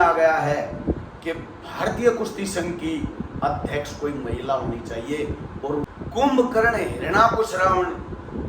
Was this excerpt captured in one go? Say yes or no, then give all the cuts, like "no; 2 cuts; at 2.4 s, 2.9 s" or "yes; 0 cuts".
no; 1 cut; at 5.9 s